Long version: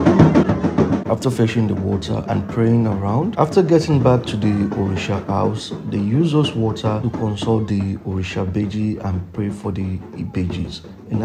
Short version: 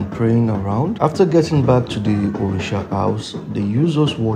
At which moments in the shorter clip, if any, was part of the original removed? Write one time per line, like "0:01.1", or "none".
none